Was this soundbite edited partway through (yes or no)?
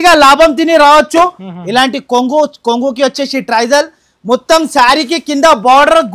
yes